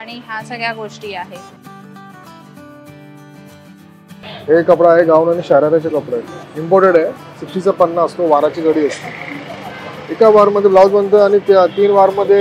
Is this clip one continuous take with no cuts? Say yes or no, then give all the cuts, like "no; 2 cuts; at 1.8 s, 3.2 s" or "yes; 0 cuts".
yes; 0 cuts